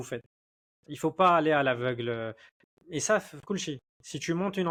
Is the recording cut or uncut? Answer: uncut